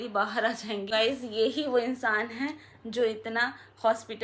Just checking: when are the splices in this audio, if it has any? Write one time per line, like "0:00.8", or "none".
0:00.9